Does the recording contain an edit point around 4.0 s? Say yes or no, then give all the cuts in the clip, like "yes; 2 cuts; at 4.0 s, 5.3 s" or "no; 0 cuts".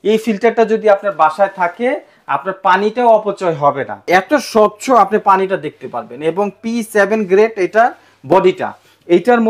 yes; 1 cut; at 4.0 s